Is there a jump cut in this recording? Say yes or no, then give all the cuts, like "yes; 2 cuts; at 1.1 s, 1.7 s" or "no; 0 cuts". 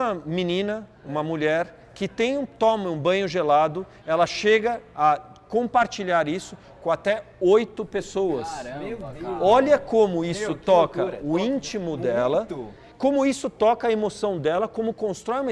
no; 0 cuts